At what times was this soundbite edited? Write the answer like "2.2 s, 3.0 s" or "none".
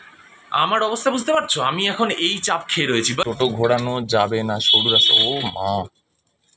3.2 s